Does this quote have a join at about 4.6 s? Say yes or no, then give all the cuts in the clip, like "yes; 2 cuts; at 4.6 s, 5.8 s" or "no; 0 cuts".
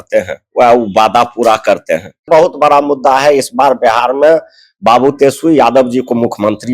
no; 1 cut; at 2.2 s